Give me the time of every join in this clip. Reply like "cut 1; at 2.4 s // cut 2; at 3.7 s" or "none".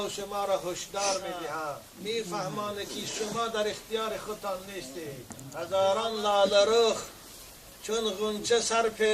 cut 1; at 1.9 s // cut 2; at 5.4 s